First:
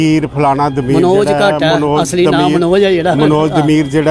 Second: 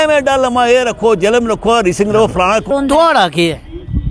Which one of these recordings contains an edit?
second; 1 cut; at 2.7 s

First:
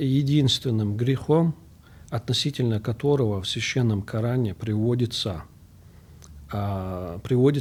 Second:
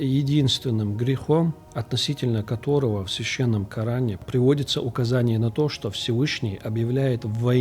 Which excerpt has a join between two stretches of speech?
second; 2 cuts; at 1.7 s, 4.2 s

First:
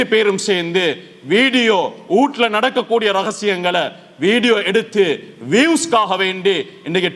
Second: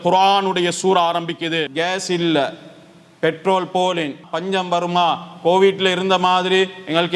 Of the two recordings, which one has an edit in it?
second; 2 cuts; at 1.7 s, 4.2 s

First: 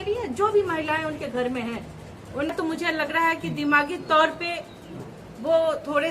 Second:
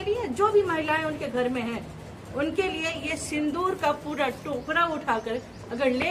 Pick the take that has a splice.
first; 1 cut; at 2.5 s

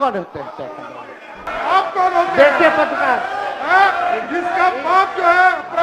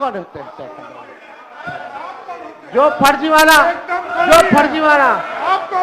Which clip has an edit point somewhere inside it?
first; 1 cut; at 1.5 s

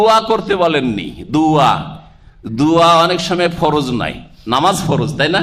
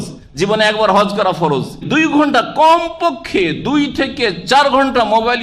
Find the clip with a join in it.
second; 1 cut; at 1.8 s

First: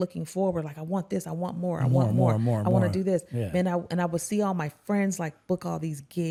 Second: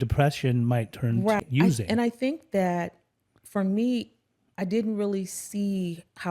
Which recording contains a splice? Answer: second; 1 cut; at 1.4 s

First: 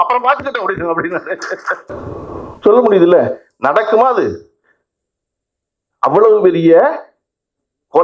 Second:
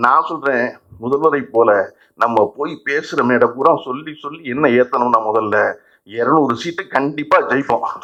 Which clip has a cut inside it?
first; 1 cut; at 1.8 s

